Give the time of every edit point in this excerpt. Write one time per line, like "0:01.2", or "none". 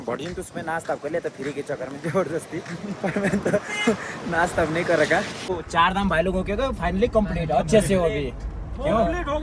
0:05.6